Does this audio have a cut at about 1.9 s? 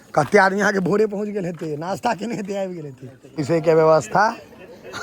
no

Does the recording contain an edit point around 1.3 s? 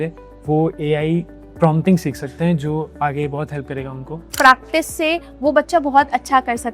no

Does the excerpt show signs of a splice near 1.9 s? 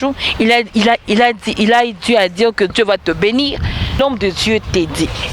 no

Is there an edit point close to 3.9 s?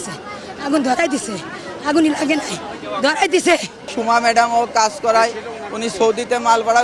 yes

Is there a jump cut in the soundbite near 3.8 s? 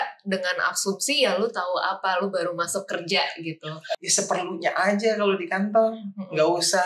yes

